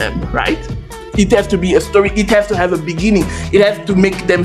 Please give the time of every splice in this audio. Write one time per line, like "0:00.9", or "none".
0:01.1